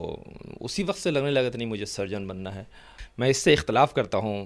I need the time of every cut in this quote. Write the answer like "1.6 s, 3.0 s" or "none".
3.0 s